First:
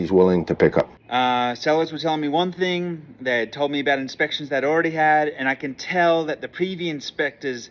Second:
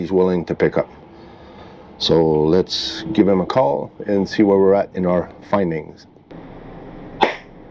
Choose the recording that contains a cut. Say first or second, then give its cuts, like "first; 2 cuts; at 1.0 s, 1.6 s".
first; 1 cut; at 1.0 s